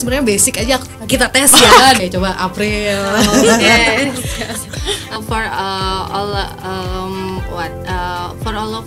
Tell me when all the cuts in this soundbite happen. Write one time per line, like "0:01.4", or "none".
0:02.0
0:05.2